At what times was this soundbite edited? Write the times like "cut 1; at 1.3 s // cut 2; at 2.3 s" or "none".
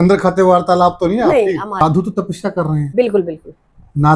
cut 1; at 1.8 s